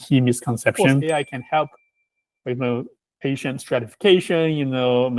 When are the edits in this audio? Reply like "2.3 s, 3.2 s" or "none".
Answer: 1.0 s, 3.0 s